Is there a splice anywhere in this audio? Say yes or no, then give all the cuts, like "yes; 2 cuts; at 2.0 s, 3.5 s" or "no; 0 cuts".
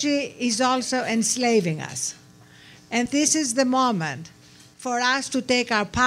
yes; 1 cut; at 3.1 s